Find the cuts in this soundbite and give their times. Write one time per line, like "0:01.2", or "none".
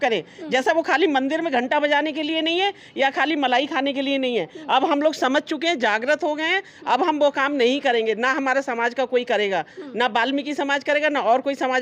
none